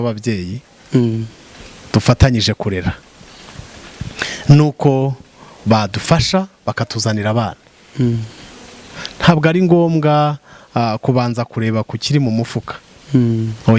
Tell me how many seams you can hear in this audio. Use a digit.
0